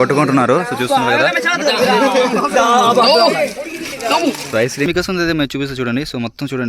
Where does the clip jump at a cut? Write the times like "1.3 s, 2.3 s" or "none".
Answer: 4.9 s